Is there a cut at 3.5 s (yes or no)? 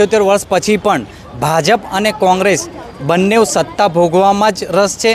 no